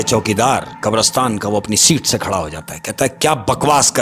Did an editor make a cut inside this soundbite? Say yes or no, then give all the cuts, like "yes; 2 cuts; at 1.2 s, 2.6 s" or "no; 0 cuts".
no; 0 cuts